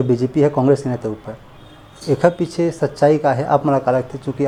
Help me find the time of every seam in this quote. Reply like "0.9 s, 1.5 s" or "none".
none